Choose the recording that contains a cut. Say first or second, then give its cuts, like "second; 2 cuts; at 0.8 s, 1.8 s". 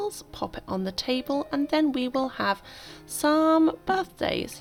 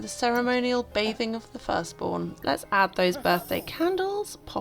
second; 1 cut; at 2.4 s